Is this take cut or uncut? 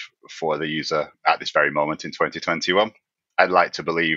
cut